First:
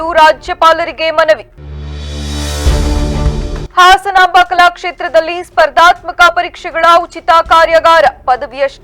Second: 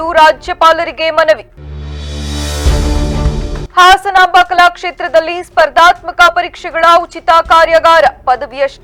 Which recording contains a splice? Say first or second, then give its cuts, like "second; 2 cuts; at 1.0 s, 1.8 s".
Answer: first; 2 cuts; at 1.6 s, 3.6 s